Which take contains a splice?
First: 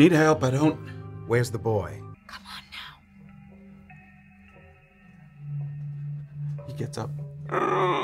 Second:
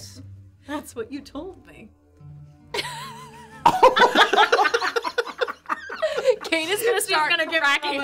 first; 1 cut; at 2.2 s

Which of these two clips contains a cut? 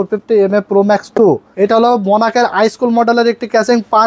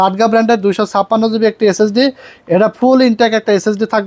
first; 1 cut; at 1.5 s

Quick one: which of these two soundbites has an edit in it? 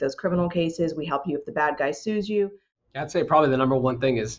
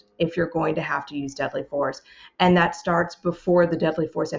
first; 1 cut; at 2.7 s

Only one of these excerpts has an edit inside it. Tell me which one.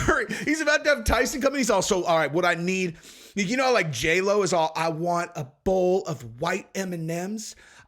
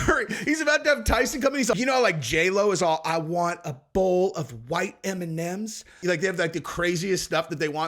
second; 2 cuts; at 1.7 s, 6.0 s

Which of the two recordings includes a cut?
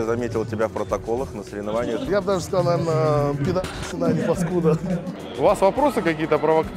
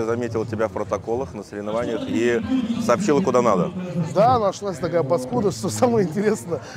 first; 2 cuts; at 2.1 s, 5.1 s

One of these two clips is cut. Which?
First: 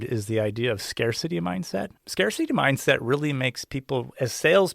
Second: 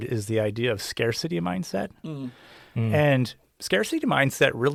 first; 1 cut; at 2.0 s

